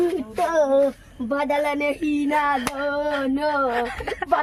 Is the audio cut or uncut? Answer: uncut